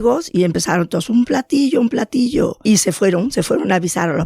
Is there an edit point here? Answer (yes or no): yes